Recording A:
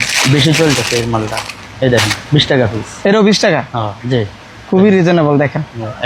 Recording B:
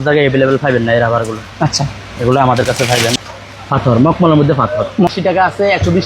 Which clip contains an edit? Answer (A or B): B